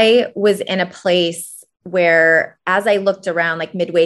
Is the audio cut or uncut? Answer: uncut